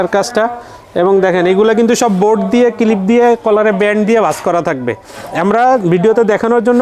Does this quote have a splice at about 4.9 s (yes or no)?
no